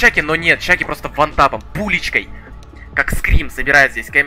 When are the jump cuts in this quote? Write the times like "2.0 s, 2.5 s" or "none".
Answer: none